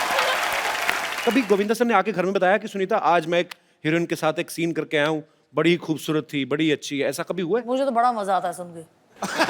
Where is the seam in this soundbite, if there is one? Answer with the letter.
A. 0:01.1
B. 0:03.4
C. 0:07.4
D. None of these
A